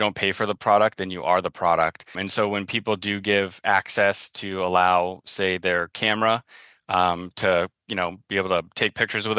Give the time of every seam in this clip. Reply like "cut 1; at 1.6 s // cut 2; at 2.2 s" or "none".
cut 1; at 2.2 s